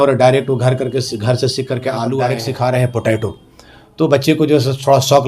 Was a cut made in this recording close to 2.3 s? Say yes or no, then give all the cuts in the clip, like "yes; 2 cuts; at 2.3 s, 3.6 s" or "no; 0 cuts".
yes; 1 cut; at 2.3 s